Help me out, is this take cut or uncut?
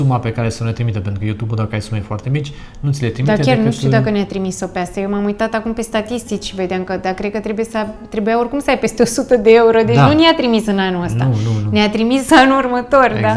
uncut